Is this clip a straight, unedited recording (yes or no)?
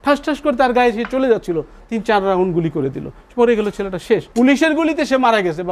no